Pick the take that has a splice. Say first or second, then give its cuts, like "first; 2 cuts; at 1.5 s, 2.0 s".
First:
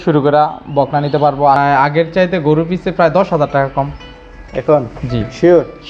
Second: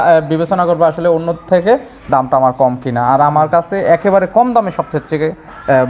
first; 1 cut; at 1.6 s